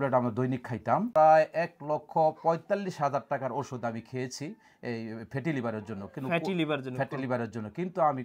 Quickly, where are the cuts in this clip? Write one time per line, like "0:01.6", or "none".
0:01.1